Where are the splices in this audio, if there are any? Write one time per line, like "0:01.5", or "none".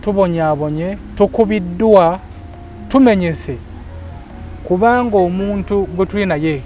0:01.0